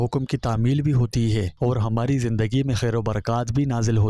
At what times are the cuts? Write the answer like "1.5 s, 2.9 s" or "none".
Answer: none